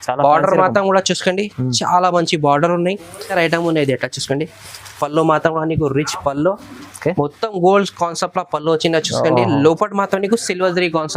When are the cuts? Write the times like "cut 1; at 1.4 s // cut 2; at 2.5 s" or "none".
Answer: cut 1; at 3.3 s